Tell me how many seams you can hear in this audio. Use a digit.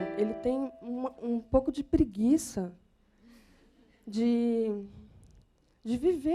0